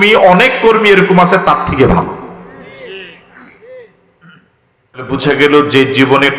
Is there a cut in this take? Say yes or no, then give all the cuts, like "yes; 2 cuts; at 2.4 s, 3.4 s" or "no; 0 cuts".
yes; 1 cut; at 5.1 s